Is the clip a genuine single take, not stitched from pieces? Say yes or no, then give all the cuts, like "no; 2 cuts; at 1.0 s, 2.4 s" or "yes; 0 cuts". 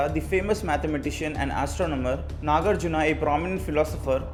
yes; 0 cuts